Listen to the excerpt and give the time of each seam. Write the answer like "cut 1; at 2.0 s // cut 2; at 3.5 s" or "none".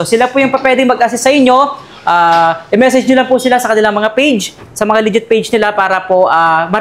none